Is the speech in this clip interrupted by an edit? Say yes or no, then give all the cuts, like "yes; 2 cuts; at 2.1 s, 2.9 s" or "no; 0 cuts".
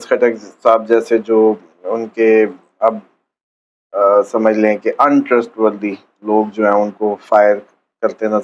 no; 0 cuts